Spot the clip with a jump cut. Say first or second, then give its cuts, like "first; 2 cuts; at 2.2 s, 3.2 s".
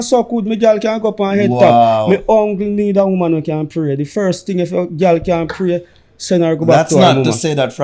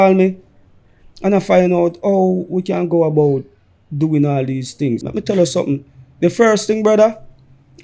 second; 1 cut; at 5.0 s